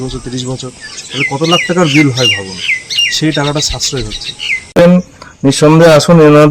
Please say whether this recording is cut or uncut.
cut